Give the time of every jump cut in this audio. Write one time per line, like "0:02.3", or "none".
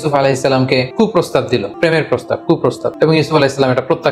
0:00.9
0:01.7
0:02.9